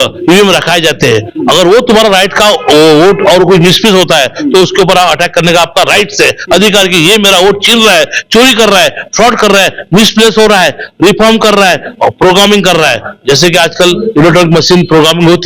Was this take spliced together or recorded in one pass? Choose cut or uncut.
uncut